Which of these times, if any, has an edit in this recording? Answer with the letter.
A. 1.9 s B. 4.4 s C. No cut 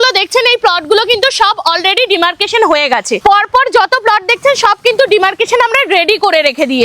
C